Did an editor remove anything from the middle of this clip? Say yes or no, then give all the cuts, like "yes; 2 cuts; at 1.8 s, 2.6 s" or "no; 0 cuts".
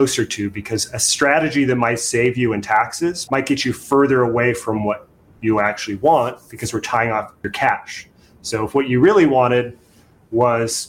yes; 2 cuts; at 3.2 s, 7.4 s